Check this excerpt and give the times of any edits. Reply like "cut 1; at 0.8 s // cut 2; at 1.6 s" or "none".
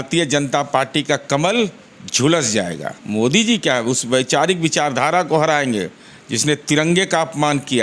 cut 1; at 2.9 s